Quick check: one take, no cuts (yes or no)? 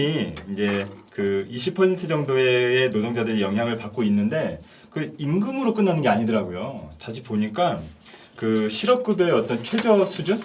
yes